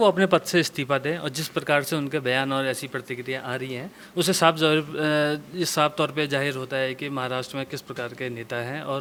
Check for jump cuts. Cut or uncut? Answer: uncut